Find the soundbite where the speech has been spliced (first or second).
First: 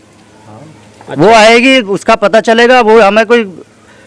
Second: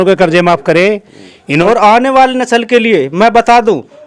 second